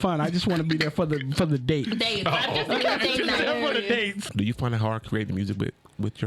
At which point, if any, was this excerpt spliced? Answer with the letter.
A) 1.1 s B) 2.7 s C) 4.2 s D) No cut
C